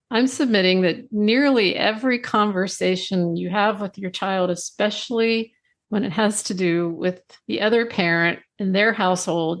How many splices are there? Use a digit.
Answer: 2